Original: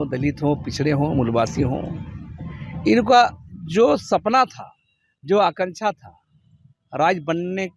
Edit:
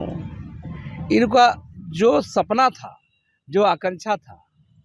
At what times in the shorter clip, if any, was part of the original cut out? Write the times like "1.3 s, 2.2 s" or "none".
none